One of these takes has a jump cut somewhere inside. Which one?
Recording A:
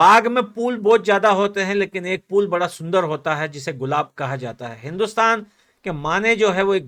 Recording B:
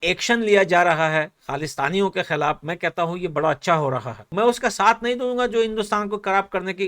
B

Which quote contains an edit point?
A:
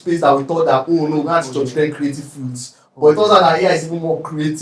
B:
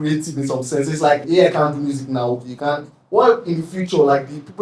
B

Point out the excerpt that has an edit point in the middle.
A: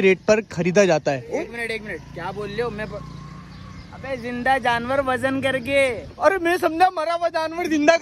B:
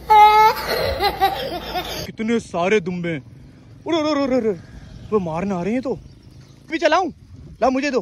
B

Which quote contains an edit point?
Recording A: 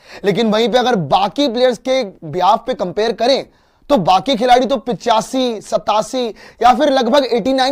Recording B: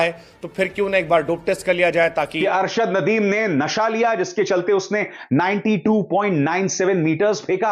B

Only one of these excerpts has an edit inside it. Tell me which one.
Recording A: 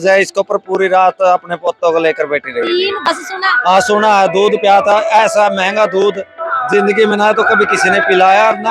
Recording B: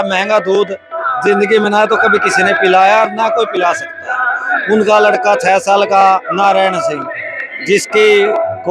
A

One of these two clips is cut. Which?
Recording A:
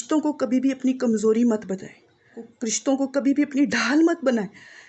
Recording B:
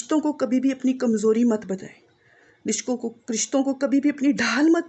A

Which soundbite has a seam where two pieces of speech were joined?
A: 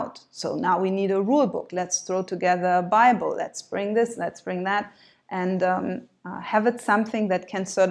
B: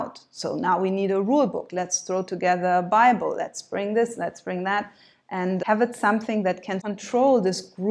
B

